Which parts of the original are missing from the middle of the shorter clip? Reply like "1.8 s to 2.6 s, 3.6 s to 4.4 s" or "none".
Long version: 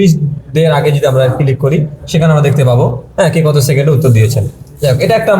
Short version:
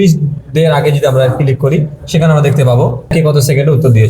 3.1 s to 3.3 s

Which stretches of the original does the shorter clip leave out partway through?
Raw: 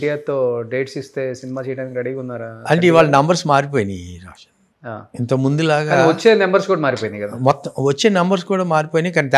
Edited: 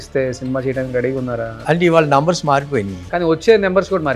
4.3 s to 6.0 s

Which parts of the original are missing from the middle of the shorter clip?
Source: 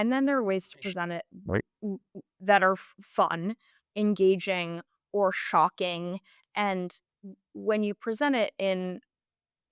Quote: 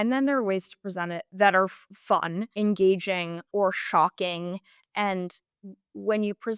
1.2 s to 2.3 s, 3.5 s to 3.8 s, 4.8 s to 5.0 s

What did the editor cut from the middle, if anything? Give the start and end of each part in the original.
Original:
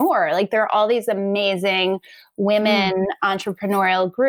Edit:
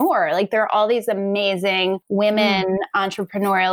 2.0 s to 2.3 s

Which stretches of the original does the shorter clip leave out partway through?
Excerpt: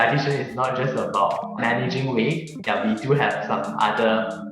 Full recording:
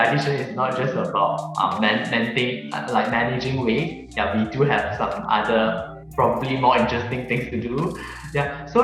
1.6 s to 3.1 s

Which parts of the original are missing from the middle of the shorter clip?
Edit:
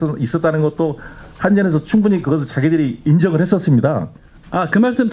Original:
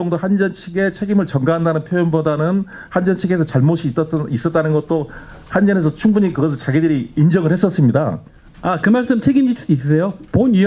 none

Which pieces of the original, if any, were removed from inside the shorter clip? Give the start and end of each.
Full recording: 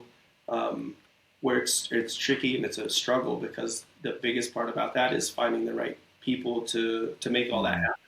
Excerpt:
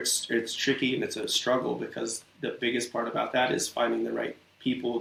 none

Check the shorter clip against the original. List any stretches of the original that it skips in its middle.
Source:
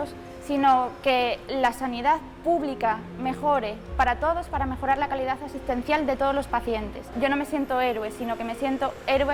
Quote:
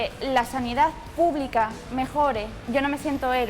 3.8 s to 7.0 s

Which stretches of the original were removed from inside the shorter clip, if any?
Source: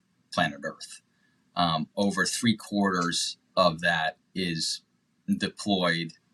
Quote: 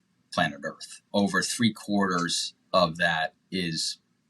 1.1 s to 1.9 s

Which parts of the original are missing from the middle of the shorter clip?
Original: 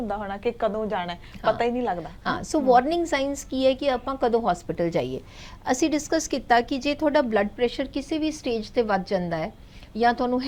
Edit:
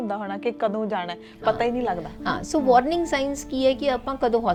none

